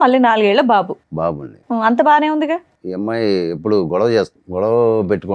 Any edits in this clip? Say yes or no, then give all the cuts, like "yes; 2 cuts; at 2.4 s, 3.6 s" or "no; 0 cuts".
yes; 2 cuts; at 2.8 s, 4.4 s